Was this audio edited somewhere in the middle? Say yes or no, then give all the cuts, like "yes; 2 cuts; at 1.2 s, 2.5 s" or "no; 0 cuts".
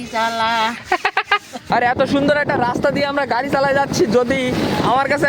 yes; 1 cut; at 1.7 s